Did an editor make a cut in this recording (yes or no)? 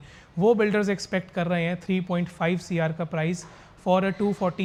no